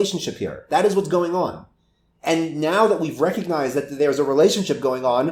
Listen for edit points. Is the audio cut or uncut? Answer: uncut